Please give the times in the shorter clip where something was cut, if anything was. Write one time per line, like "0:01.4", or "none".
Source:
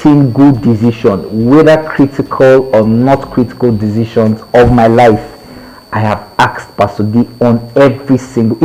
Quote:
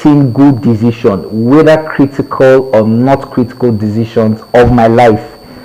none